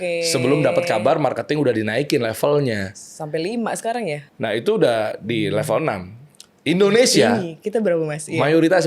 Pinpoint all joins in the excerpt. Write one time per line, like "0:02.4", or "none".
0:04.3